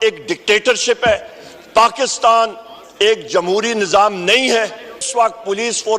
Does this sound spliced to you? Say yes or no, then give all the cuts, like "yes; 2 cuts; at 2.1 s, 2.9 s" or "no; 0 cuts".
yes; 1 cut; at 5.1 s